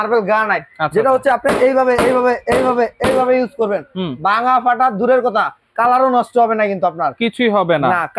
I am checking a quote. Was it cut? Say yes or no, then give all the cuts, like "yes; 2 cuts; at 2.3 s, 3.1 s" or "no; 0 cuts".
no; 0 cuts